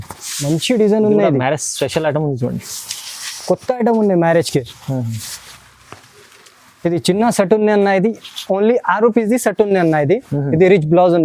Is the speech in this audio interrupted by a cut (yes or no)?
no